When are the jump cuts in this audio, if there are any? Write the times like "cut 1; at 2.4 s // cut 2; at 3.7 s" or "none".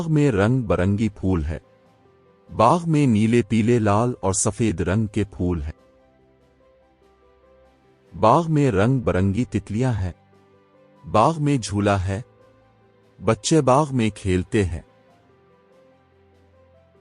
none